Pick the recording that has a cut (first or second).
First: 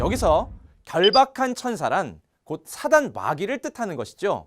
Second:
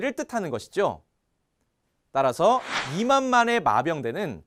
first